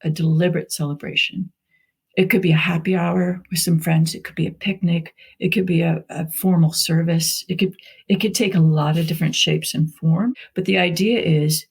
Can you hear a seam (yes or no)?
yes